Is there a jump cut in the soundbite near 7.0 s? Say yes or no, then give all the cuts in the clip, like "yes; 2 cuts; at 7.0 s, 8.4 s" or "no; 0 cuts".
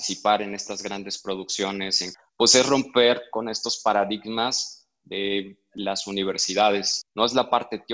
yes; 2 cuts; at 2.0 s, 7.0 s